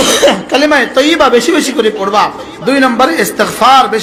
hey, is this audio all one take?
yes; 0 cuts

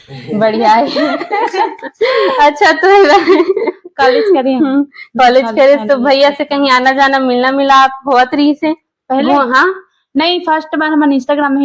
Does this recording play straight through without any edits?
yes; 0 cuts

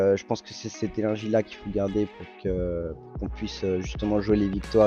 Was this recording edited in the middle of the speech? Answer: no; 0 cuts

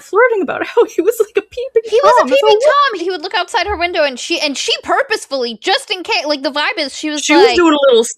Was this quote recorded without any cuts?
no; 1 cut; at 3.0 s

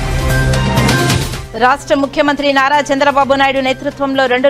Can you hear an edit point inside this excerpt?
yes; 1 cut; at 1.3 s

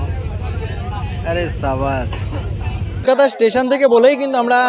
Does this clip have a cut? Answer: yes; 1 cut; at 3.0 s

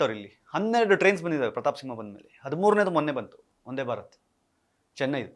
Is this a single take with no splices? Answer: yes; 0 cuts

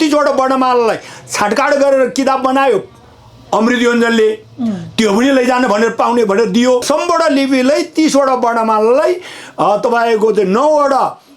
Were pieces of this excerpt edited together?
yes; 1 cut; at 6.9 s

